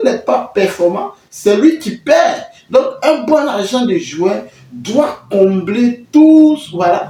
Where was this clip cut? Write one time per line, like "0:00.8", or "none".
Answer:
none